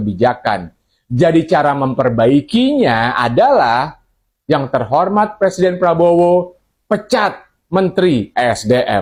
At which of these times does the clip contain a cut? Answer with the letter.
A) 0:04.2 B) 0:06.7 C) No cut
C